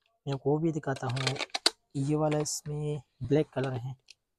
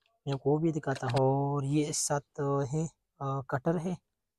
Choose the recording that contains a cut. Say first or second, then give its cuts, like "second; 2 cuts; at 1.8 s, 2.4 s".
second; 1 cut; at 1.0 s